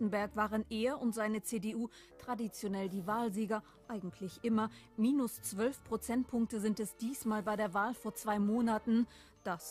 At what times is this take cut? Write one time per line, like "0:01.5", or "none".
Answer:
0:08.2